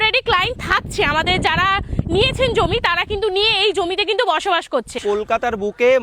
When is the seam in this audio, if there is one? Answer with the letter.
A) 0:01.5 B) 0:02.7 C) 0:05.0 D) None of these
C